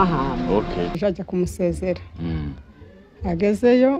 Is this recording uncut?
no; 1 cut; at 1.0 s

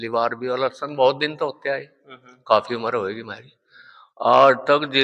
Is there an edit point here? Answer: no; 0 cuts

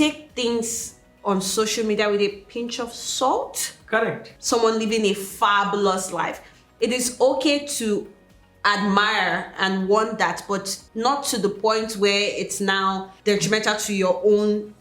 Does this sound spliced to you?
yes; 3 cuts; at 4.3 s, 10.8 s, 13.1 s

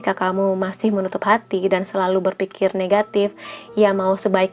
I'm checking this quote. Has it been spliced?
no; 0 cuts

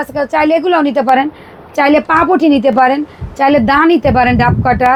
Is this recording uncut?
yes; 0 cuts

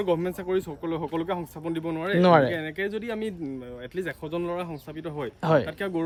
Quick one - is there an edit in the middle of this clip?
no; 0 cuts

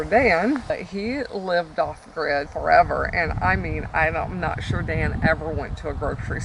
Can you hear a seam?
yes; 2 cuts; at 0.7 s, 2.5 s

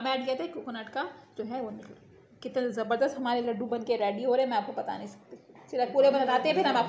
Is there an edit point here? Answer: no; 0 cuts

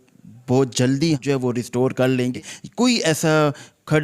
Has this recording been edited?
yes; 2 cuts; at 1.2 s, 2.3 s

